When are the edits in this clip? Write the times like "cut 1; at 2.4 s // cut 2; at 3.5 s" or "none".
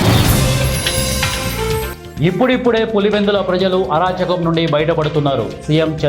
cut 1; at 2.0 s